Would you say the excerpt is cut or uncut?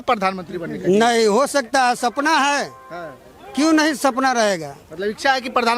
uncut